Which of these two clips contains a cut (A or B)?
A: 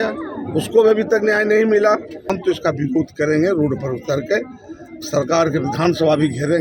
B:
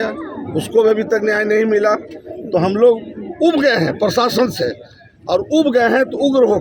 A